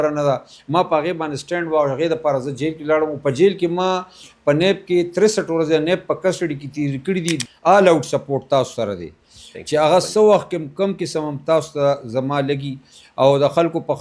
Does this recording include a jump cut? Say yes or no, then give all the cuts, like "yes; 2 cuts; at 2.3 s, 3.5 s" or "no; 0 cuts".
yes; 1 cut; at 7.4 s